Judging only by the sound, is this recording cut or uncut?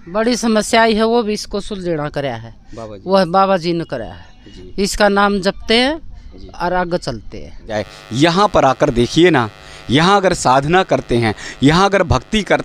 cut